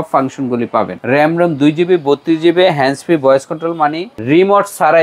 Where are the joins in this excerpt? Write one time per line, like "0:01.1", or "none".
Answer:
0:01.0
0:04.1

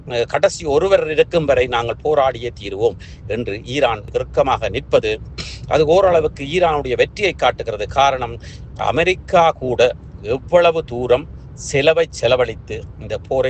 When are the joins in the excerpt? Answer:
none

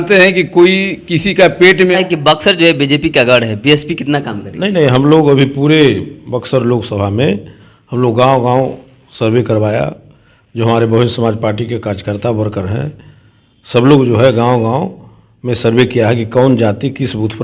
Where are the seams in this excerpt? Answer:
0:02.0

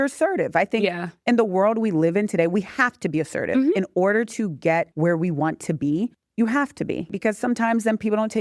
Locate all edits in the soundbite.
0:04.9
0:06.2
0:07.1

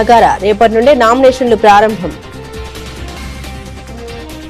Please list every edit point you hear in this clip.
0:02.2

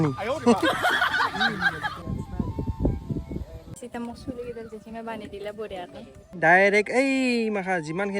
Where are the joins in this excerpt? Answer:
0:02.0
0:06.3

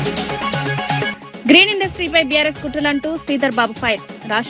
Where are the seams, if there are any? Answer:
0:01.2

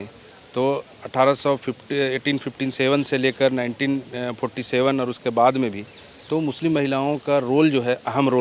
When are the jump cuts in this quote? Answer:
none

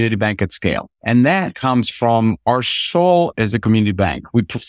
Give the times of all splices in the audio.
0:00.9
0:01.5

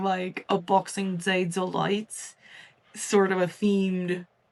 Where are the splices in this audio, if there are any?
none

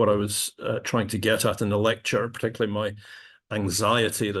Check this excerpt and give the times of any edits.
none

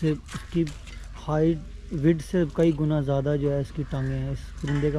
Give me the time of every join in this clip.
none

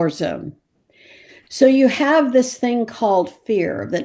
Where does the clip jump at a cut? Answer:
none

